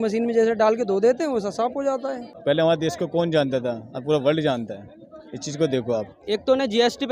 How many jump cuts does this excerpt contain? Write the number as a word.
two